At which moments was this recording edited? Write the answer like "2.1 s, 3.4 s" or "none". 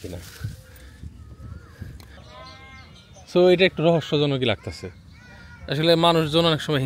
2.2 s